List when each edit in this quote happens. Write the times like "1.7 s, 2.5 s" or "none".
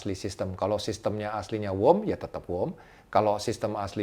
none